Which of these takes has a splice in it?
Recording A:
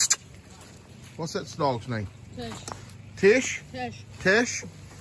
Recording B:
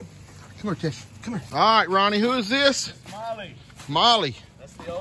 B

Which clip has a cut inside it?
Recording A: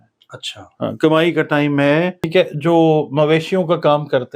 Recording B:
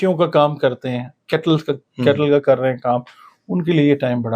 A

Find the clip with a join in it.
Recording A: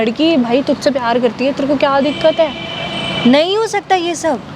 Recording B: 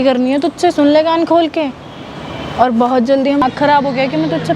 B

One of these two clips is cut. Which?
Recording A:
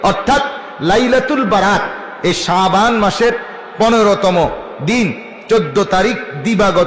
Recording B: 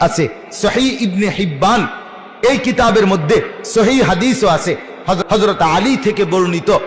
B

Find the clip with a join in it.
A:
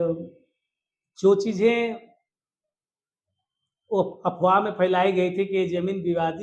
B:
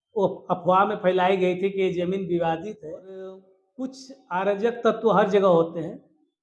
B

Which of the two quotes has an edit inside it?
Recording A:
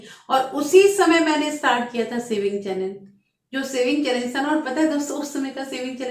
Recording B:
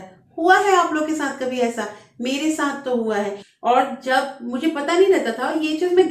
B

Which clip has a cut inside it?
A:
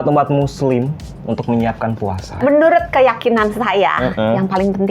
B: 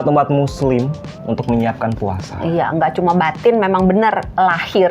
A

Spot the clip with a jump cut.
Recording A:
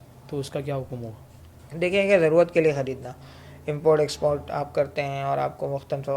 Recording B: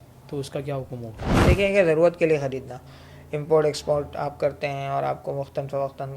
B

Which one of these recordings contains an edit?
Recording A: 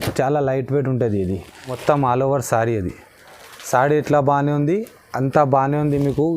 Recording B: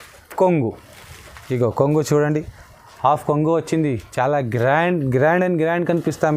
A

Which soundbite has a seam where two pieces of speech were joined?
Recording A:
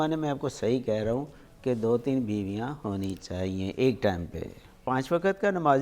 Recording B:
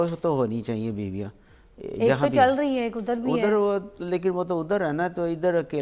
A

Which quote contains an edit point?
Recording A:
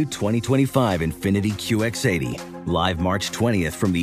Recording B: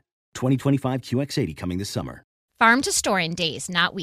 B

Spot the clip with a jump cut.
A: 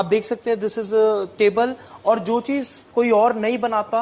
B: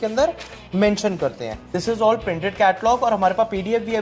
B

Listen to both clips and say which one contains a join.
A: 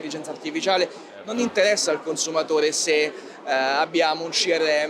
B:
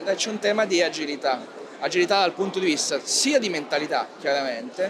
A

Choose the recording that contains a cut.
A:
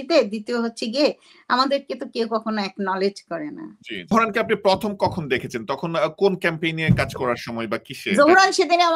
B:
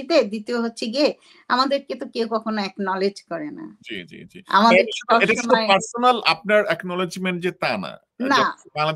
A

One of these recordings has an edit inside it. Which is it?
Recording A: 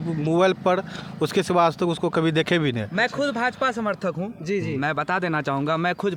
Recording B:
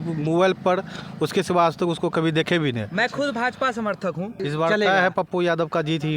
B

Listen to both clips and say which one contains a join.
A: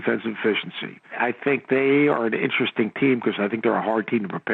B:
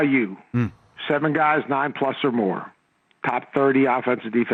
A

